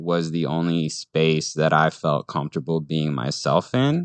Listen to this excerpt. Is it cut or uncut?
uncut